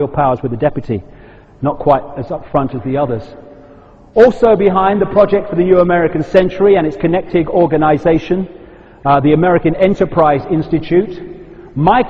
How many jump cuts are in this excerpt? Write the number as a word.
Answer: one